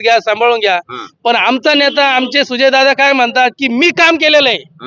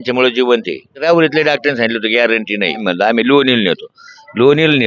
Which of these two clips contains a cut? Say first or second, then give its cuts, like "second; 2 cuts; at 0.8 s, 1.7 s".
second; 2 cuts; at 0.9 s, 2.8 s